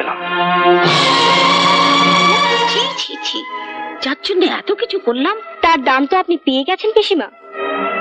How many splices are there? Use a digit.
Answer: 1